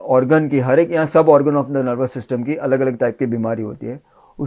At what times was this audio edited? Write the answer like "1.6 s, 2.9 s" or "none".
none